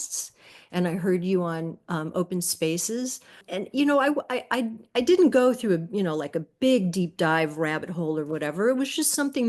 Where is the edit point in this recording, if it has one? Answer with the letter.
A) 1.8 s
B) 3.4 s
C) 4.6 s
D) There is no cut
B